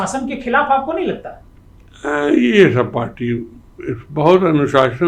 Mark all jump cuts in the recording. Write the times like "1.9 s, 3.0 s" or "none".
none